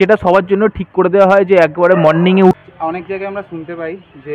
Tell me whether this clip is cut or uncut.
cut